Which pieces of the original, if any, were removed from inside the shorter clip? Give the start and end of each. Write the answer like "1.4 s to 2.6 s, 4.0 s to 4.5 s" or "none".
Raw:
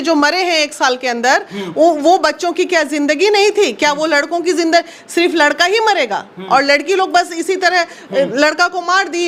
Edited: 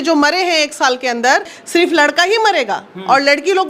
1.6 s to 5.0 s